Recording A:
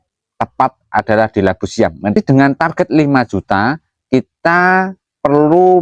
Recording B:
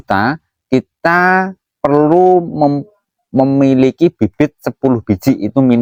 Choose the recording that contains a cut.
A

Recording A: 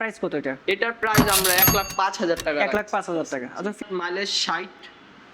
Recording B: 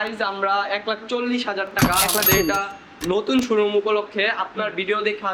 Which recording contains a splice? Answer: A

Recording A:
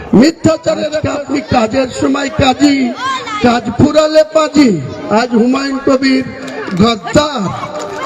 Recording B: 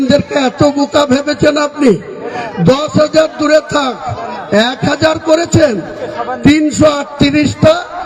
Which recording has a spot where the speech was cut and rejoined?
A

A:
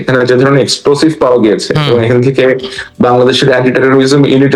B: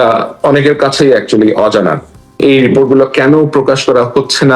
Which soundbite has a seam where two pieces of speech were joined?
B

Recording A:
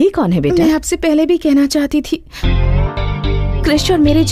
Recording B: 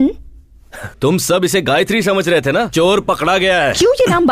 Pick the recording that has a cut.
B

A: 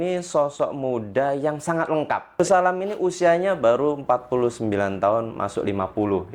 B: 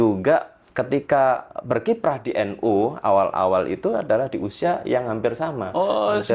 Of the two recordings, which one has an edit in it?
A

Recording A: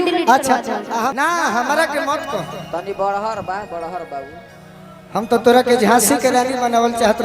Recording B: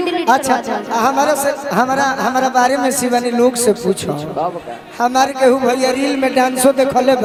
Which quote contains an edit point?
A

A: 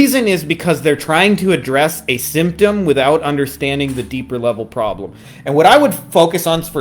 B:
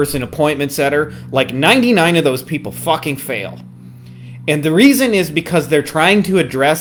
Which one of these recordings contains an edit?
A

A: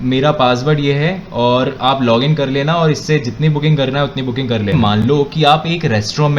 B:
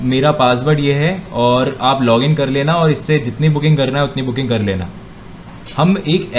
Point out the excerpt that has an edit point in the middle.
A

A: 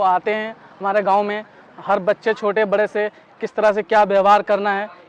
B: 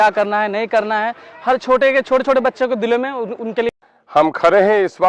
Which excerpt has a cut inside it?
B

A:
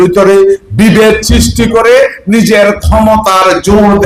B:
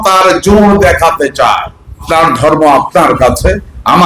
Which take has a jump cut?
B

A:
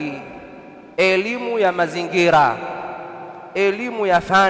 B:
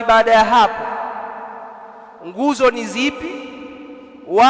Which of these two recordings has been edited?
A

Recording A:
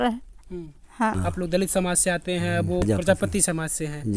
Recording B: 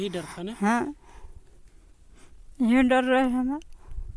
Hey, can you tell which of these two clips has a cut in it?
A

